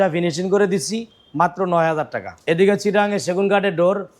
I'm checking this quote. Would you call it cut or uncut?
cut